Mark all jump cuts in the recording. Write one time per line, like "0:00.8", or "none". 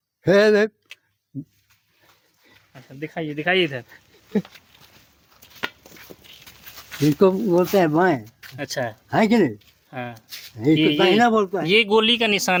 none